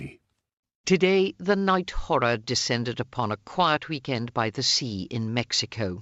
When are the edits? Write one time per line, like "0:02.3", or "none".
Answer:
none